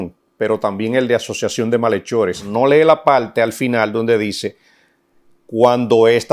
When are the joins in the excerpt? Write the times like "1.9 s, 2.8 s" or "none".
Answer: 2.5 s